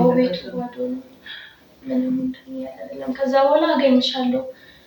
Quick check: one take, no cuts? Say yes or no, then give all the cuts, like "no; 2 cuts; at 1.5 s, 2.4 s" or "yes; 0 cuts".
yes; 0 cuts